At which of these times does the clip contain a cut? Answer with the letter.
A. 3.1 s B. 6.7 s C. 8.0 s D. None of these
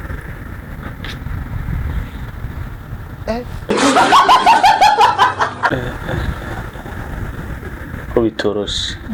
D